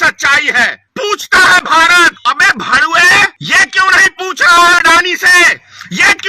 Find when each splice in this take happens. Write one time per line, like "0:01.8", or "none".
0:00.9
0:02.2
0:03.4